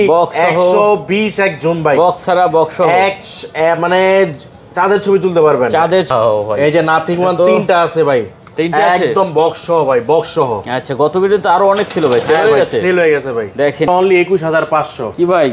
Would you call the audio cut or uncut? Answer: cut